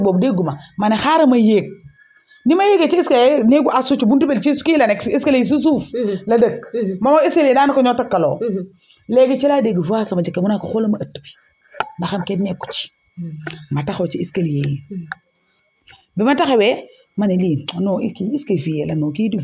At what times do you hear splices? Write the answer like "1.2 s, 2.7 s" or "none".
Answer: none